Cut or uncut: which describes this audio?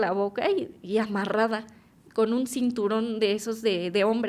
cut